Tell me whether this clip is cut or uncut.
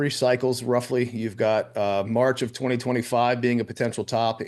uncut